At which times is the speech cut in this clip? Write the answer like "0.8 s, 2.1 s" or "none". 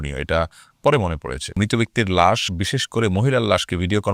1.5 s